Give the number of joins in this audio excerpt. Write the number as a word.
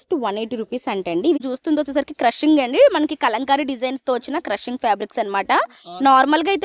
one